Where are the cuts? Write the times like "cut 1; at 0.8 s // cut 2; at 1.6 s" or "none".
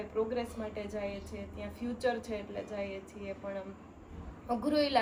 none